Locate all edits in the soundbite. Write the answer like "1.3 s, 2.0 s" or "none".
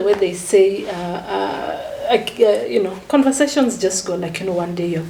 none

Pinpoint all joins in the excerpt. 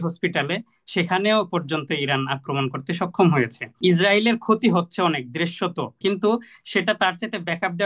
3.8 s, 5.9 s

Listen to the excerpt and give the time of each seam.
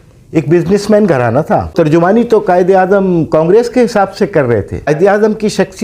1.7 s, 4.9 s

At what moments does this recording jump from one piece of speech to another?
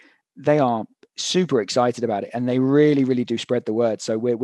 none

